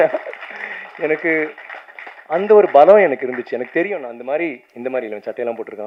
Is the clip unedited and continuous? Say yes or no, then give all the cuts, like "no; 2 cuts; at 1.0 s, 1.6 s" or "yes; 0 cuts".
yes; 0 cuts